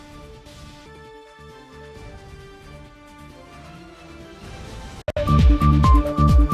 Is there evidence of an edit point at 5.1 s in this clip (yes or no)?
yes